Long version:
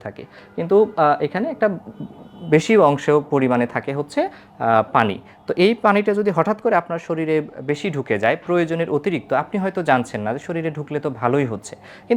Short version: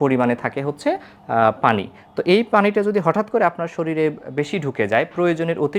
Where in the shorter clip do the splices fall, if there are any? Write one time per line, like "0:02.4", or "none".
none